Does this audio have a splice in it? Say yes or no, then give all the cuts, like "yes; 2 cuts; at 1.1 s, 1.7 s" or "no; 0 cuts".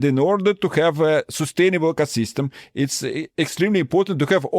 yes; 1 cut; at 3.3 s